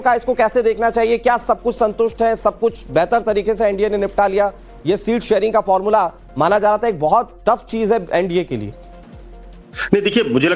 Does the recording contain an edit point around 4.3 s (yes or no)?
yes